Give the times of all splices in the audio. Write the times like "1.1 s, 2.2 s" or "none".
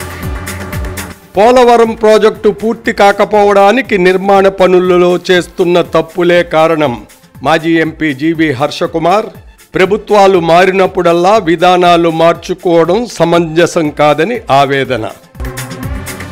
1.0 s